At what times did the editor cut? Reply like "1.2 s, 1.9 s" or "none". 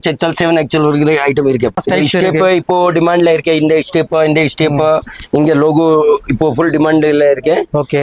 1.7 s